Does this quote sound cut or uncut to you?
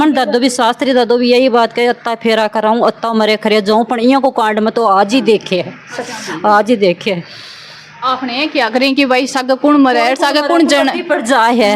uncut